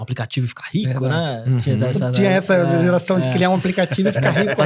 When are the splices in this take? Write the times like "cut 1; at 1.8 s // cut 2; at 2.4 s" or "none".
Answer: none